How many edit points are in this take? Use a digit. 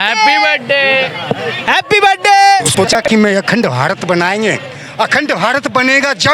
1